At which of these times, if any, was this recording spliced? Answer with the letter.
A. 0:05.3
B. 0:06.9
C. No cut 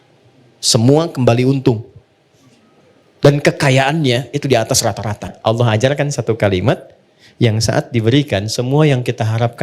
A